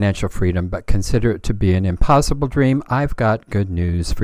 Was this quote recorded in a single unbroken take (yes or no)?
yes